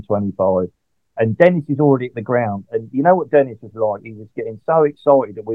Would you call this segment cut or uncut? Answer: cut